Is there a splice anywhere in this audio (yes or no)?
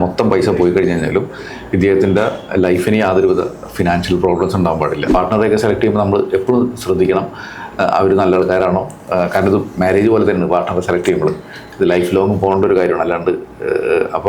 yes